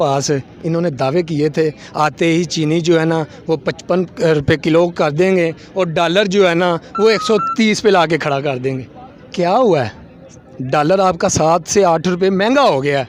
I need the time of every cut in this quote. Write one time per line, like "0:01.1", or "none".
none